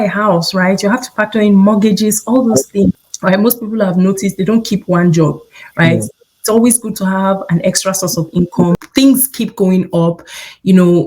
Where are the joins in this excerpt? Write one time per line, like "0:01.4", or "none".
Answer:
0:03.1
0:08.8

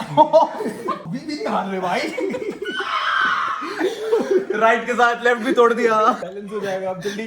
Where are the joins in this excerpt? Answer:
0:01.0
0:06.2

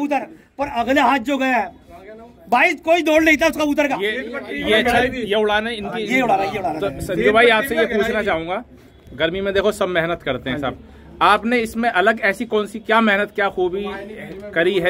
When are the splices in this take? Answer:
none

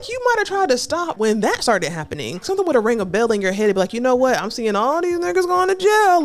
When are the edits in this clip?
0:01.1
0:02.5

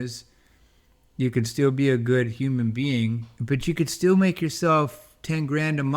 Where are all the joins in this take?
0:03.3

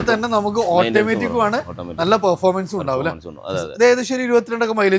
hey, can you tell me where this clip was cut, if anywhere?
none

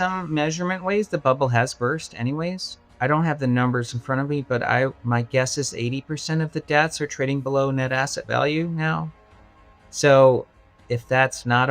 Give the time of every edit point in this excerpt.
0:02.8

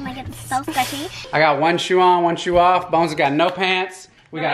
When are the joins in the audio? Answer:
0:01.3

